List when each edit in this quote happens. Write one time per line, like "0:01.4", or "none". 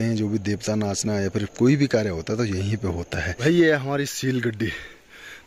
0:03.4